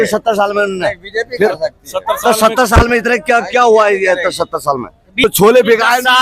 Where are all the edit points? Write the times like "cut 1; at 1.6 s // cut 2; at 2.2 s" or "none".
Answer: cut 1; at 5.2 s